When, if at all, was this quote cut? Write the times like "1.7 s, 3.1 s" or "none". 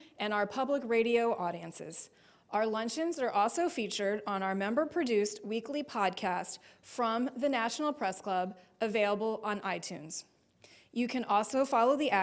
3.3 s